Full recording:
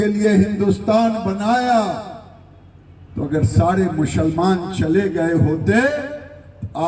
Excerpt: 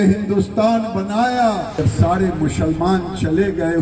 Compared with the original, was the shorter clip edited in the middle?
yes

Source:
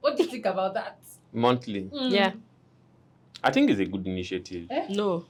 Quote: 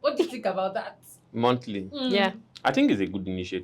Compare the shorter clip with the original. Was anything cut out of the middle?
yes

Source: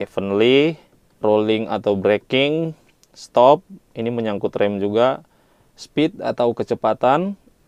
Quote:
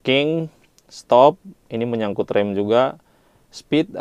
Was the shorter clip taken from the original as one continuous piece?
yes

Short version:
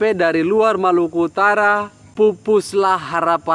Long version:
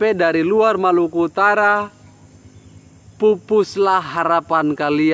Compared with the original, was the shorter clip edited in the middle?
yes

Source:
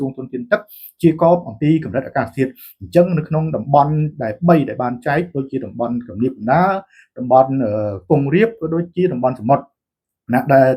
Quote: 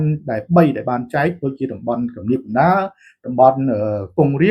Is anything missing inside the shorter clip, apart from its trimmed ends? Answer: no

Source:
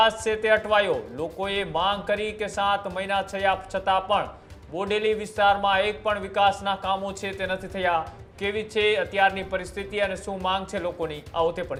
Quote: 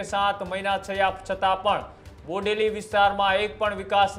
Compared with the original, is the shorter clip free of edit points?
yes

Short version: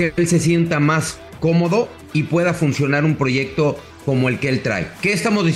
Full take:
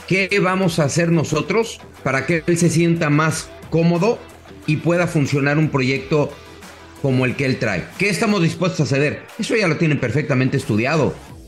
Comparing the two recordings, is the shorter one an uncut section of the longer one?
no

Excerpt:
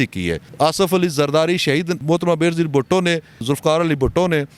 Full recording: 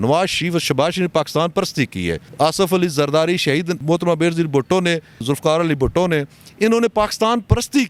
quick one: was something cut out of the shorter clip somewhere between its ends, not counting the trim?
no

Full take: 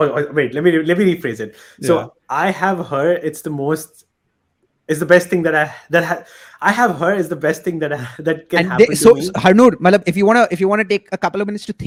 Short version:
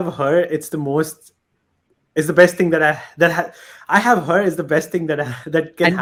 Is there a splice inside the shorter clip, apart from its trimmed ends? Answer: no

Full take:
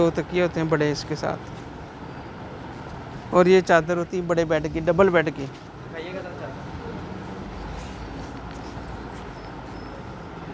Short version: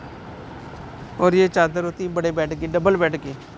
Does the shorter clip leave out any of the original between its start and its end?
no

